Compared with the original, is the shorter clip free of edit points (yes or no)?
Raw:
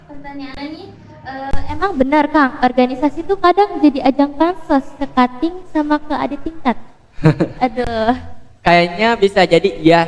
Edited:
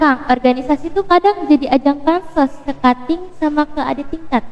yes